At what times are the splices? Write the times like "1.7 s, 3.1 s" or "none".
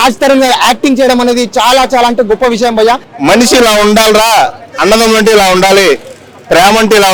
3.1 s